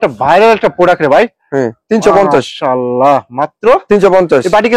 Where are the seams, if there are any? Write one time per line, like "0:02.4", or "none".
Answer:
none

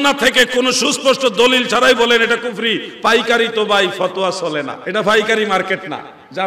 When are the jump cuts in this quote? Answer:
0:04.8

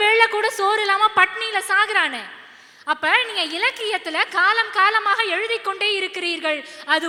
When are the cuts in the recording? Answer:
none

